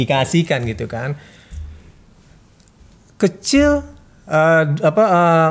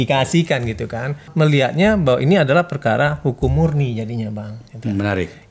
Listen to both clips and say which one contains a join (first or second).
second